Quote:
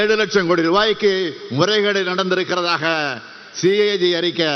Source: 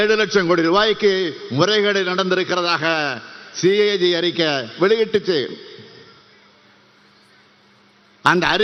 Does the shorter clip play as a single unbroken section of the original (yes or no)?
yes